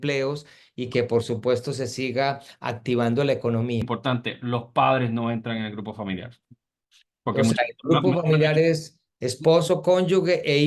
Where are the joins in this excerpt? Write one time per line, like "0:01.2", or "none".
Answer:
0:03.9